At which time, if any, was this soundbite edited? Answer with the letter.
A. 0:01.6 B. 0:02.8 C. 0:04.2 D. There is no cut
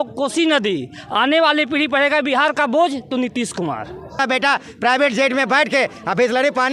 C